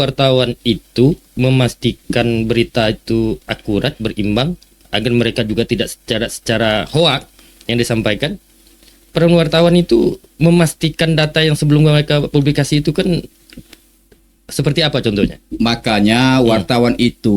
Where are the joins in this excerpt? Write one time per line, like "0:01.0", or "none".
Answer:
none